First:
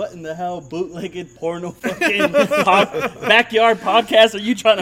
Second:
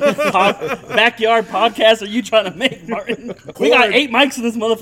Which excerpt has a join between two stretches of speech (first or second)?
second